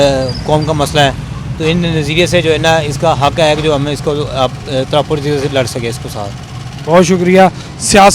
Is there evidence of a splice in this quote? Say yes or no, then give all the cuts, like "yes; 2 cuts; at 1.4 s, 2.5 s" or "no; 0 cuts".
no; 0 cuts